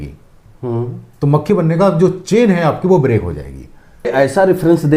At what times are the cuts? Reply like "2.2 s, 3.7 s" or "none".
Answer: 4.1 s